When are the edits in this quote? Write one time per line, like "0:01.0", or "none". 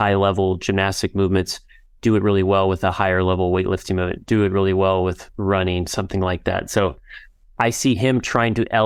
none